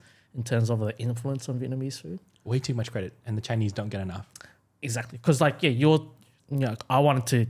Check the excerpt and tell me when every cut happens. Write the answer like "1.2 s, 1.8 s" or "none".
none

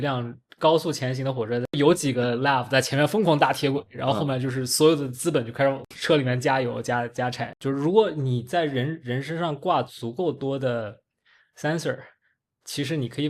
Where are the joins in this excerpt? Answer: 1.8 s, 5.9 s, 7.5 s

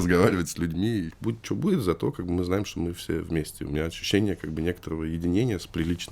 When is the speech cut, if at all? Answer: 1.1 s

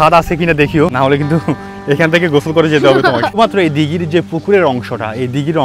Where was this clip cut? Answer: 0.9 s, 3.4 s

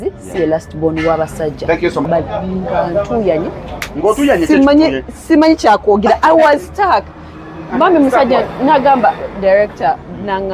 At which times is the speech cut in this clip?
2.0 s

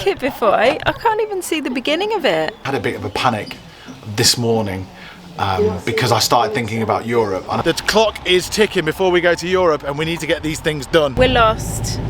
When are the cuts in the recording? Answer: 2.6 s, 7.6 s, 11.1 s

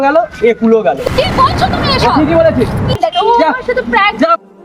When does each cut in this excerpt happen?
3.0 s

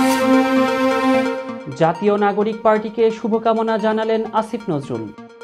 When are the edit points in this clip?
none

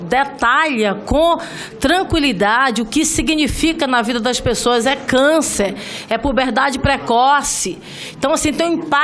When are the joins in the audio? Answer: none

